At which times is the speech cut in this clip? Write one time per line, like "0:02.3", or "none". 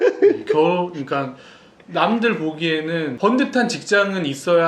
0:03.1